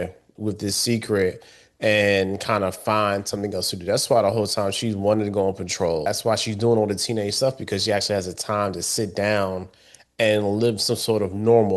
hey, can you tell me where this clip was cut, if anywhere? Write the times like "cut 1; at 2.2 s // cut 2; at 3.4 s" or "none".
cut 1; at 6.0 s